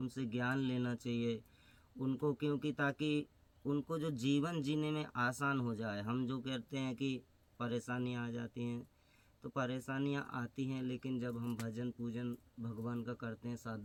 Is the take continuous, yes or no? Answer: yes